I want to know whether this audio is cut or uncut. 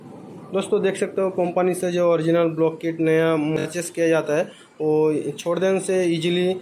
cut